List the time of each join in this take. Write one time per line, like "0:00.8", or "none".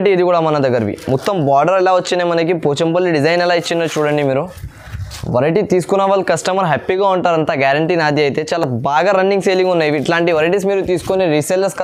none

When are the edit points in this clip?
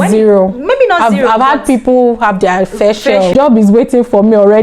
0:03.4

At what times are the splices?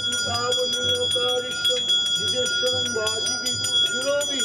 none

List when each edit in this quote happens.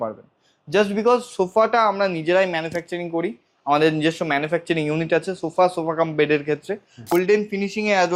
0:07.0

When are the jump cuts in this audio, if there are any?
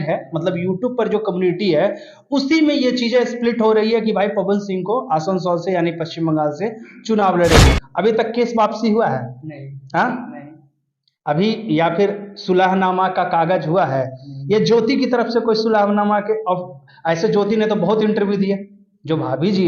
0:07.7

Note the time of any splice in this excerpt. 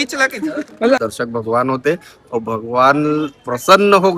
0:01.0

